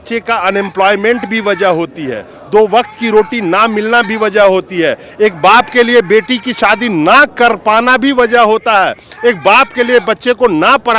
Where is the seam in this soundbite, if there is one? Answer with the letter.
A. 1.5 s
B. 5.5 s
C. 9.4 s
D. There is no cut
D